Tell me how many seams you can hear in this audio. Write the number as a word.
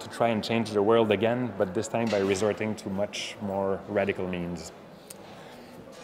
zero